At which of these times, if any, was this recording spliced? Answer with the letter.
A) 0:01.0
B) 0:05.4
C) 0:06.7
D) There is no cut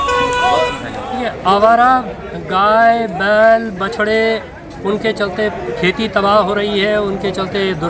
A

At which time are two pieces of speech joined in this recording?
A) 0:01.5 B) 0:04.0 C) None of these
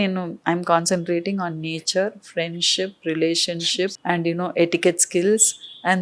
B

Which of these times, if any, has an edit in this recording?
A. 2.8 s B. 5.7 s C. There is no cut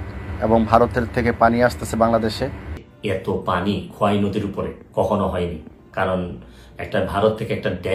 A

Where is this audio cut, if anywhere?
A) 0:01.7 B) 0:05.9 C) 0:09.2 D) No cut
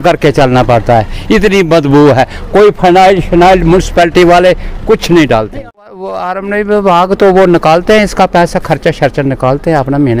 B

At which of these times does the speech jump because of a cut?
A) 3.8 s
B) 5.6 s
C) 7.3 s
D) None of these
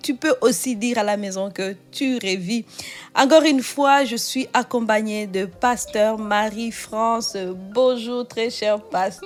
D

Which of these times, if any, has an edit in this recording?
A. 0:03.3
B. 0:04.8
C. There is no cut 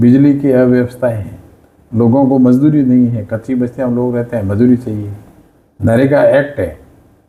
C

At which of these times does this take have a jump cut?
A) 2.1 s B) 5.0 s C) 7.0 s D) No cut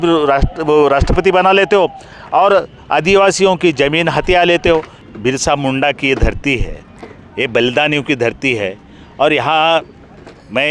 B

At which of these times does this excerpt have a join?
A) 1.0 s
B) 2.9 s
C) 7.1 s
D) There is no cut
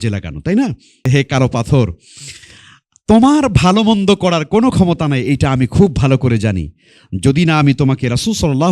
A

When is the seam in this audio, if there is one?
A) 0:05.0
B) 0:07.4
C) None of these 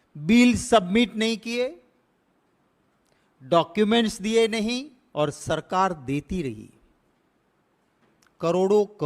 A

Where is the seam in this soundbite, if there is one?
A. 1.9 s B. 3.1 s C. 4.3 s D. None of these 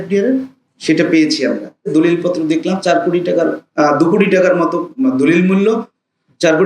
A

